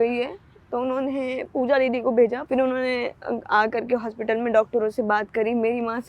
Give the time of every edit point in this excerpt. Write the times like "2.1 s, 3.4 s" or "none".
2.4 s

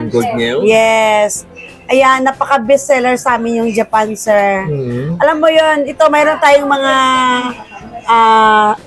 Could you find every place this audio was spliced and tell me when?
none

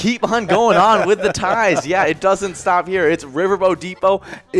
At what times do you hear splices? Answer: none

